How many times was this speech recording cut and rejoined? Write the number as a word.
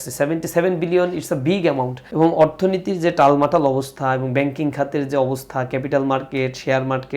one